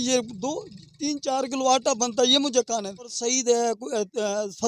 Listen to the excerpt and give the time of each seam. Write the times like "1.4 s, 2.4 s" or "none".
3.2 s